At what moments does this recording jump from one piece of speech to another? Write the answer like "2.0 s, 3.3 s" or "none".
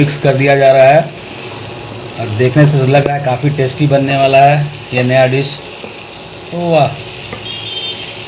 none